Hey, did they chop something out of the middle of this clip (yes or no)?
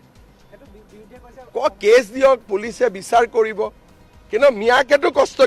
no